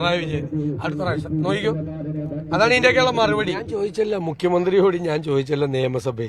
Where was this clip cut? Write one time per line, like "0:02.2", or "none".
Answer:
0:03.7